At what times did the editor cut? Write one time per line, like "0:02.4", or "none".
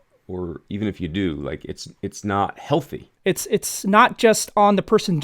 0:03.0